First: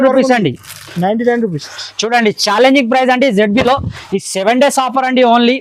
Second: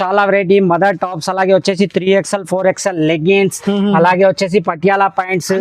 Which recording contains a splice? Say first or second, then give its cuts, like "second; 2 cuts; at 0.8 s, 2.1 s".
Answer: first; 1 cut; at 1.7 s